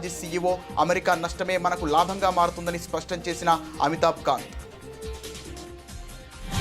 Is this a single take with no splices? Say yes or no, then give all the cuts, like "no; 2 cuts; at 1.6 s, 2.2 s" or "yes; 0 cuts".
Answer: no; 1 cut; at 4.5 s